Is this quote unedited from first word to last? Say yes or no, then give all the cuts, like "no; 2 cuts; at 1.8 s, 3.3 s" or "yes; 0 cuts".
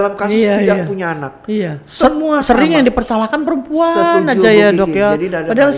yes; 0 cuts